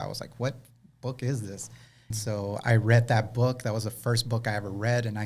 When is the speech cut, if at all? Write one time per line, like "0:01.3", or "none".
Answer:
0:02.1